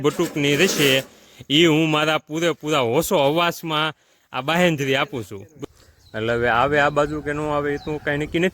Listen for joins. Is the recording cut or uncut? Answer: cut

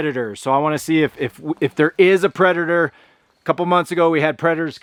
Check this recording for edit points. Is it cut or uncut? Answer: uncut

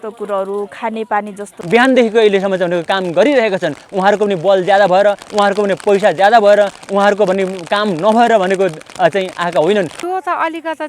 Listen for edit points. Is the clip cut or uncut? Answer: cut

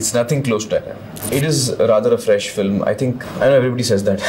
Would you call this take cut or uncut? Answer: cut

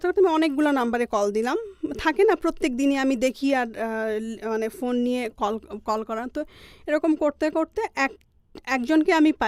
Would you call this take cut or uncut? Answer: uncut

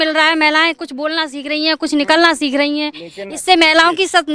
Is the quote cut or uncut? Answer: uncut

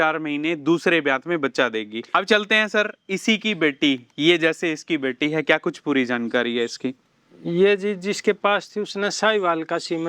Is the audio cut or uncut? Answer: cut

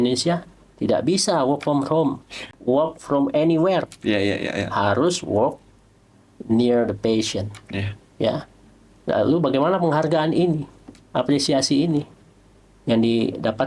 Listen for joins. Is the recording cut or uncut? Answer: cut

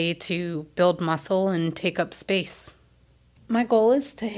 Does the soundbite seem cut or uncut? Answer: cut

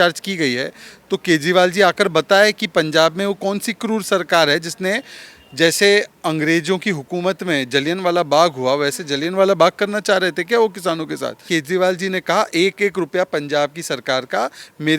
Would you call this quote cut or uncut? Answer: cut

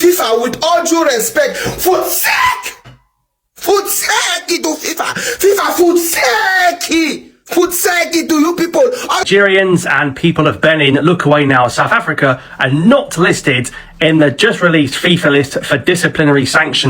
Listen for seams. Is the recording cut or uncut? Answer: cut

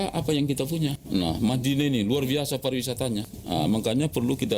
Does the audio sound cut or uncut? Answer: cut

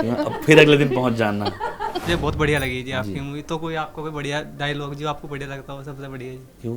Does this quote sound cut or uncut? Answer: cut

